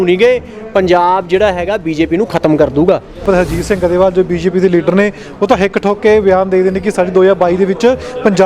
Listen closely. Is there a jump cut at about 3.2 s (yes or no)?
yes